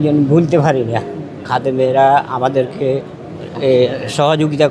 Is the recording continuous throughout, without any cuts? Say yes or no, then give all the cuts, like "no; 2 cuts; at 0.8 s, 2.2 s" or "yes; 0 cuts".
no; 1 cut; at 1.4 s